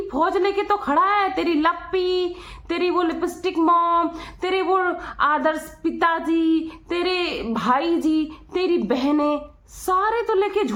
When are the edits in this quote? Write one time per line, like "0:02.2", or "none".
none